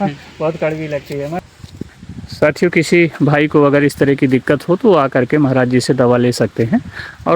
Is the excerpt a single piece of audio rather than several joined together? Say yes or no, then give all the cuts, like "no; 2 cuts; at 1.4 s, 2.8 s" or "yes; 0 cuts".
no; 1 cut; at 1.5 s